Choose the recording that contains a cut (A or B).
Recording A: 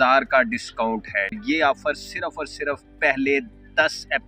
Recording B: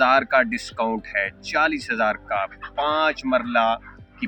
A